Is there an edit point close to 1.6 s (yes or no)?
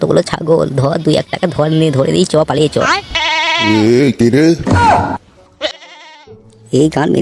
no